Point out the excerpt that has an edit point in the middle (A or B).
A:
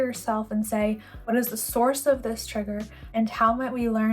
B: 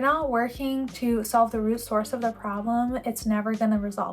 A